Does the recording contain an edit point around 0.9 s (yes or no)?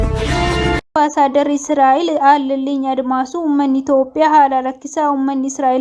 yes